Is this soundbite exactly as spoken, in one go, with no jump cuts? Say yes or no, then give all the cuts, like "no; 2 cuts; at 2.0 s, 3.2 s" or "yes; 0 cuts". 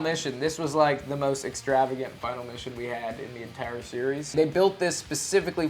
no; 1 cut; at 4.2 s